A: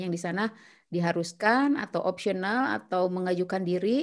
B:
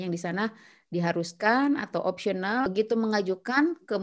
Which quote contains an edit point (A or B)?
B